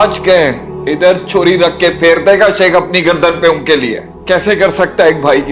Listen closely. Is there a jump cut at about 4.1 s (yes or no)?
yes